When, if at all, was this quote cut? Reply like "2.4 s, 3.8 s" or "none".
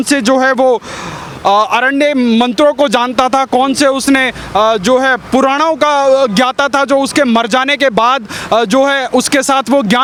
none